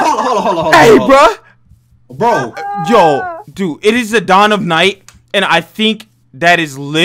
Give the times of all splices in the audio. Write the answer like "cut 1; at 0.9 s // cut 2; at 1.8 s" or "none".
none